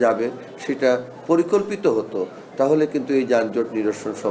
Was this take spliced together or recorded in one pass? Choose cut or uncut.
uncut